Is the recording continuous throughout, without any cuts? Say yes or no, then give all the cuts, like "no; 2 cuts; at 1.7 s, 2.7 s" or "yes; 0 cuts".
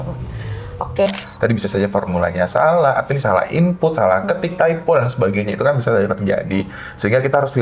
no; 1 cut; at 1.1 s